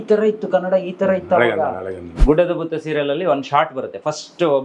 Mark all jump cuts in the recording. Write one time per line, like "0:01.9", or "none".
0:02.1